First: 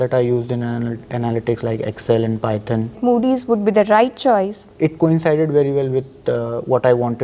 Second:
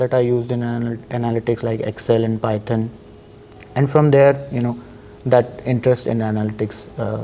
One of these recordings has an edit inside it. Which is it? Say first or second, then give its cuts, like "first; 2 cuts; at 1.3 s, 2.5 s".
first; 2 cuts; at 3.0 s, 4.6 s